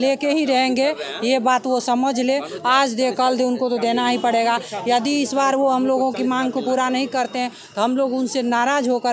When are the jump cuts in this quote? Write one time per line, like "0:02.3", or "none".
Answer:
none